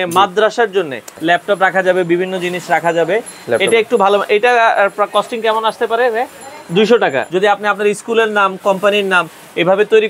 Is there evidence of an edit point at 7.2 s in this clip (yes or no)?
yes